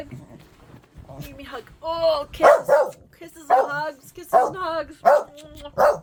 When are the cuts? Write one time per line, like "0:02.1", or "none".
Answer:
none